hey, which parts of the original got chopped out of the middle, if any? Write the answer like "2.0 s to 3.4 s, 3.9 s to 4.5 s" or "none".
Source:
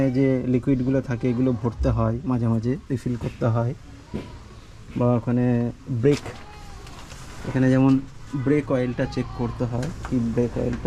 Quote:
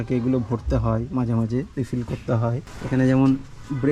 3.8 s to 7.3 s